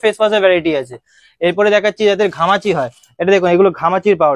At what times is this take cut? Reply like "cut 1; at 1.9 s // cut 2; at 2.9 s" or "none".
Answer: none